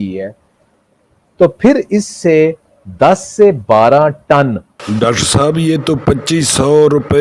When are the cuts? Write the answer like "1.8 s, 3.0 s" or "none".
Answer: 4.7 s